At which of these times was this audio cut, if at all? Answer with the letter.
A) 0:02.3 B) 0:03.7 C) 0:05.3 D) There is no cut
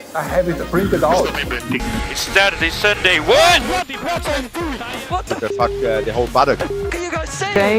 D